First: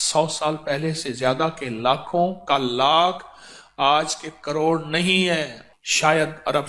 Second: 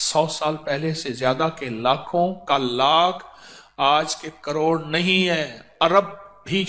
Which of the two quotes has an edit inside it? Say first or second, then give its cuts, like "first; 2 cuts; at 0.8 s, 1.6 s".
first; 1 cut; at 5.6 s